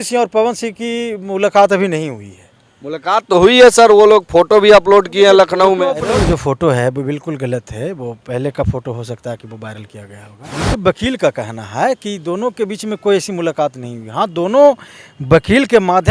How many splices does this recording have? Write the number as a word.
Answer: two